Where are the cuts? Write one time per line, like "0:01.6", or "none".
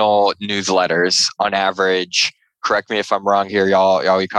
0:02.6